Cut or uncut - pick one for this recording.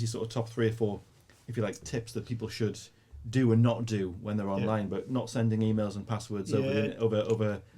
uncut